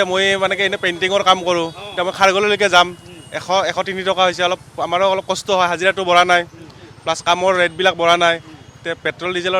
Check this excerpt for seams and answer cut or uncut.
uncut